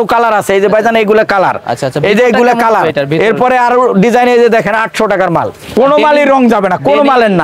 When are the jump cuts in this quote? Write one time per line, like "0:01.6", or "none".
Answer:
0:05.6